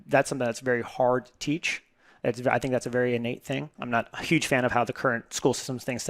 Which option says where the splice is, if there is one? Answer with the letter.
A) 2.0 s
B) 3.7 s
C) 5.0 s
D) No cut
B